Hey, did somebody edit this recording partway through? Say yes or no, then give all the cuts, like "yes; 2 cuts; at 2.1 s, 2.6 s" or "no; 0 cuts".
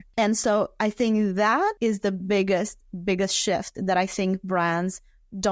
yes; 1 cut; at 1.8 s